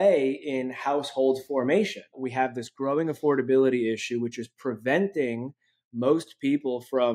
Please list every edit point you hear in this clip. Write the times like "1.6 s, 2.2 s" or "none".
2.2 s